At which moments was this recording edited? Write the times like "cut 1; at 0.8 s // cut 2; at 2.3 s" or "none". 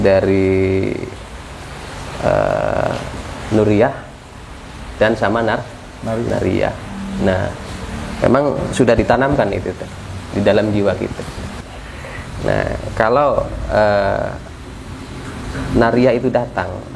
cut 1; at 11.5 s